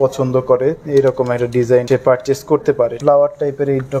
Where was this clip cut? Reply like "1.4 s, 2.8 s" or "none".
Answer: 1.8 s, 3.0 s